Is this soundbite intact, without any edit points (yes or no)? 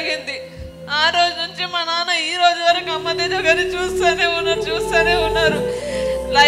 yes